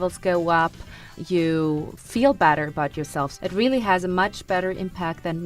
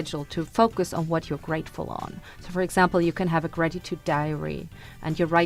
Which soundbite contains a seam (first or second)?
first